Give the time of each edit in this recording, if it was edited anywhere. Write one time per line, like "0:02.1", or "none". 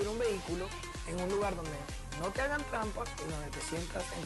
none